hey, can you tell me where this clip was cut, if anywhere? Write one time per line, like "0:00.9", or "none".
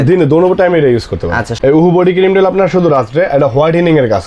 0:01.4